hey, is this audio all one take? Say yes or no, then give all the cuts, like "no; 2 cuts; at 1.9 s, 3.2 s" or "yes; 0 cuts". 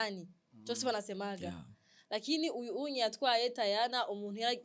yes; 0 cuts